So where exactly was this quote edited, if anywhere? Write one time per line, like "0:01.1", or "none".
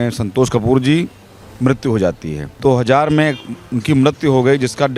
0:02.5